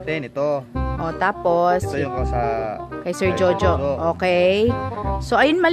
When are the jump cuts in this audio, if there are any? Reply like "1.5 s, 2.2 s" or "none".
none